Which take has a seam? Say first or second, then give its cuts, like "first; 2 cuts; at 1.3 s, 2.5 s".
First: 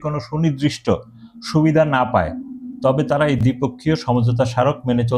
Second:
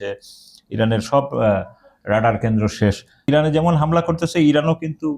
second; 1 cut; at 3.3 s